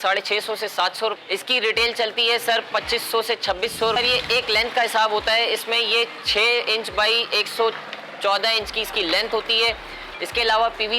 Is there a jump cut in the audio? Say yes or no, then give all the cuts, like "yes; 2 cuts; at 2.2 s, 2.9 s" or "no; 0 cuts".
no; 0 cuts